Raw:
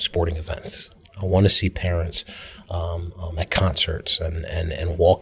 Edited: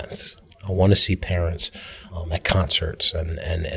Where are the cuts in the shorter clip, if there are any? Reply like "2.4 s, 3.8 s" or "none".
2.0 s